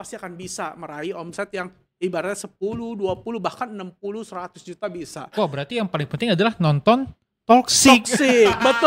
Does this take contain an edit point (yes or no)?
no